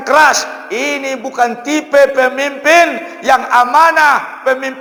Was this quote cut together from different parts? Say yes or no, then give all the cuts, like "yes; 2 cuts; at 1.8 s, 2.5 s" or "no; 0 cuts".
no; 0 cuts